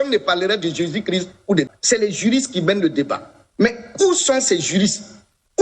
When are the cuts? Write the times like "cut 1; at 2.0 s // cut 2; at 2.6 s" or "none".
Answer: cut 1; at 1.7 s